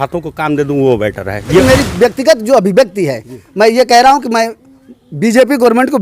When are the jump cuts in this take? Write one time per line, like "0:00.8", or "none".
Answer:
0:01.6